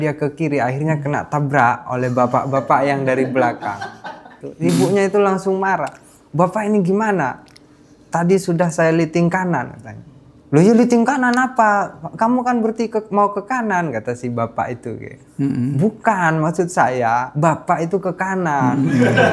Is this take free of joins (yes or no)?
no